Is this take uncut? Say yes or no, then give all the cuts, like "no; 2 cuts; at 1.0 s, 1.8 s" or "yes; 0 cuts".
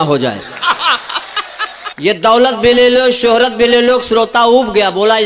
no; 1 cut; at 1.8 s